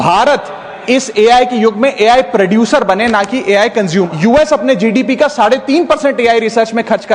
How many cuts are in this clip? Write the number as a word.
one